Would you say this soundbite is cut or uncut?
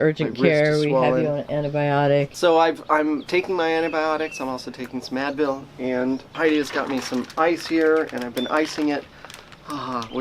cut